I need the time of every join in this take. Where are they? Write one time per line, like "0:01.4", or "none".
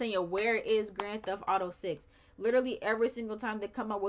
none

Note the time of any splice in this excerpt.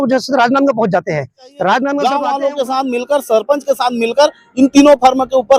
0:02.0

